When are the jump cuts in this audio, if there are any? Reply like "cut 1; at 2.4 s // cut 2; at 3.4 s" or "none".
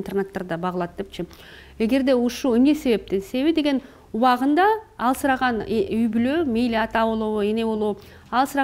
none